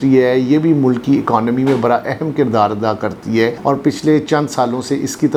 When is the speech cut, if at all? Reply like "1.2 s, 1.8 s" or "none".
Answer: none